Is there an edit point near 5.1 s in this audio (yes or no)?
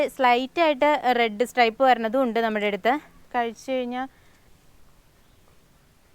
no